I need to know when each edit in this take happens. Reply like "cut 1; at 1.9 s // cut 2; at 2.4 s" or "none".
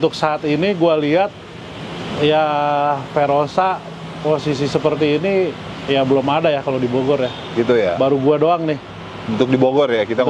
none